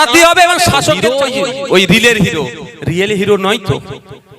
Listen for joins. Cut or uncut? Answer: cut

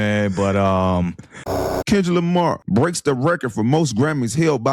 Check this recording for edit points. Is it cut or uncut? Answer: cut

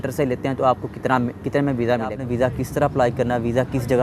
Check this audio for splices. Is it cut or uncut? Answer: cut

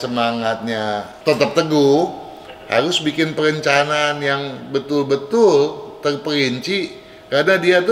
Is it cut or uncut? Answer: cut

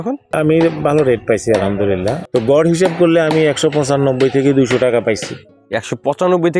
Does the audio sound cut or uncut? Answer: cut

